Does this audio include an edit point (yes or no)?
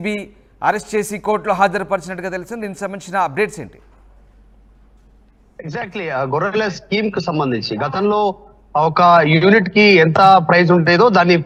no